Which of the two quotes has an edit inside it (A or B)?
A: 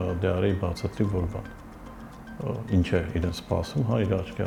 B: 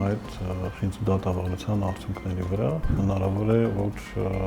B